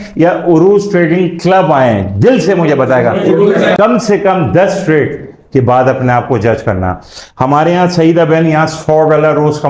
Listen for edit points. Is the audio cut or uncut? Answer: cut